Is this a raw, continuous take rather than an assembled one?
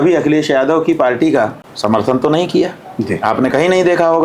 no; 1 cut; at 1.6 s

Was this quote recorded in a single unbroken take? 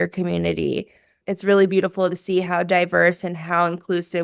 no; 1 cut; at 1.2 s

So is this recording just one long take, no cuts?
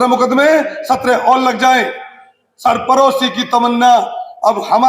yes; 0 cuts

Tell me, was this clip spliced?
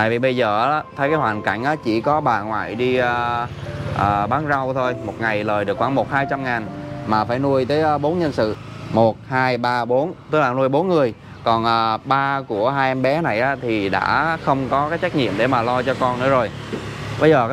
yes; 1 cut; at 8.6 s

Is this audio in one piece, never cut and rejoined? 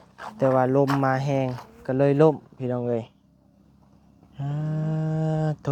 yes; 0 cuts

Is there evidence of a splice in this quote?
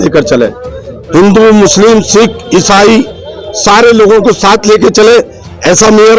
no; 0 cuts

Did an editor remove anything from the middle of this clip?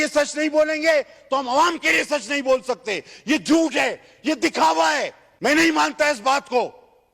yes; 1 cut; at 5.2 s

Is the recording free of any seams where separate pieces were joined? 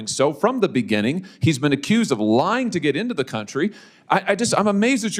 yes; 0 cuts

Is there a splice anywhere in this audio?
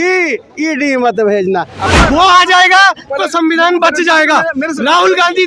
yes; 1 cut; at 1.8 s

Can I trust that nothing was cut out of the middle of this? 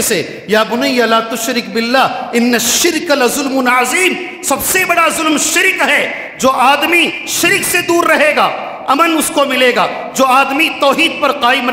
yes; 0 cuts

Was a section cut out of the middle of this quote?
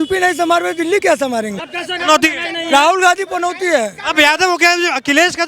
yes; 1 cut; at 1.6 s

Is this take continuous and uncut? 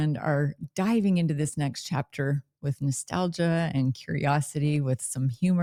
yes; 0 cuts

